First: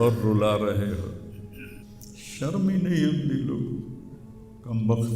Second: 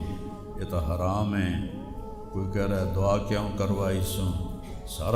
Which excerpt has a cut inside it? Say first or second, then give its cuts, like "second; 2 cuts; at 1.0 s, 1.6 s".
first; 1 cut; at 1.8 s